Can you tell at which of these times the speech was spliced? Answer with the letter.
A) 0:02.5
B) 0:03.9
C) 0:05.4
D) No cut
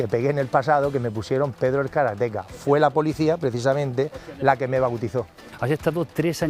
C